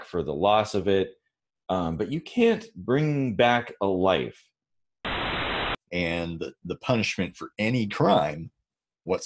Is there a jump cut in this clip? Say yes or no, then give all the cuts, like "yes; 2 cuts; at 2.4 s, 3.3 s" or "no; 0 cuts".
yes; 1 cut; at 5.3 s